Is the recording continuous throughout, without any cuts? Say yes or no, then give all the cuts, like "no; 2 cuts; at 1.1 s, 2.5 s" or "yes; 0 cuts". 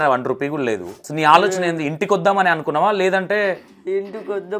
no; 1 cut; at 1.0 s